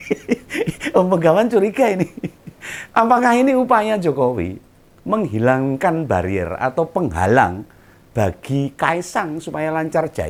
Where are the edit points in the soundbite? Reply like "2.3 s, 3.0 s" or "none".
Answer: none